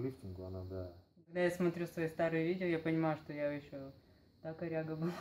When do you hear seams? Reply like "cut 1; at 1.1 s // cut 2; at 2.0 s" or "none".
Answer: cut 1; at 1.3 s